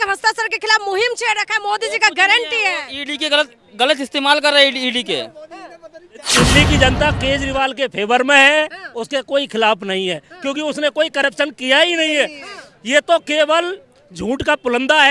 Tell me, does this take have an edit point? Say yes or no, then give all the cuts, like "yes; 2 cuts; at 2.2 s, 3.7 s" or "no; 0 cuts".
yes; 1 cut; at 6.4 s